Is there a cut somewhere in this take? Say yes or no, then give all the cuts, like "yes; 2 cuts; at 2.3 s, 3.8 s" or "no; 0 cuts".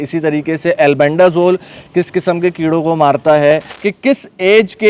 yes; 1 cut; at 3.7 s